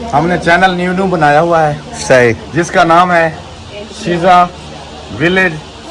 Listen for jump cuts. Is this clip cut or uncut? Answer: uncut